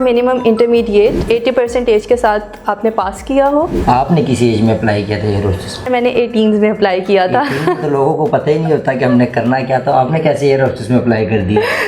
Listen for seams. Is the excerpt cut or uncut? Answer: cut